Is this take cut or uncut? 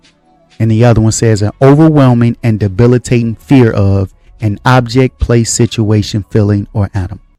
uncut